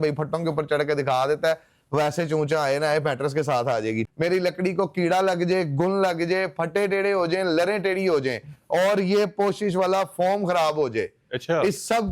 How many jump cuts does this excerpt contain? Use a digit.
1